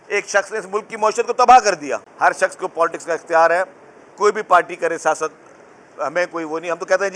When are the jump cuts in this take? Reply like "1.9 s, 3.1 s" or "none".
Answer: 2.1 s